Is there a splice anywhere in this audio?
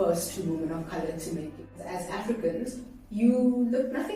yes; 1 cut; at 1.8 s

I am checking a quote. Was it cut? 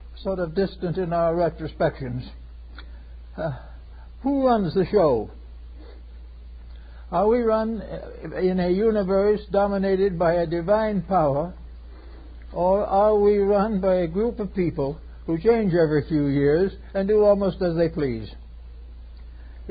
yes; 1 cut; at 16.5 s

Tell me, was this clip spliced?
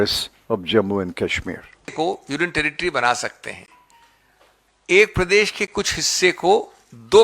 yes; 1 cut; at 1.9 s

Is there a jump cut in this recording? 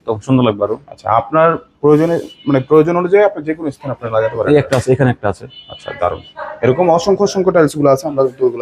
no; 0 cuts

